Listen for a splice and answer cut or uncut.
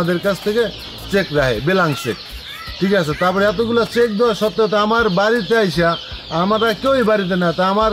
uncut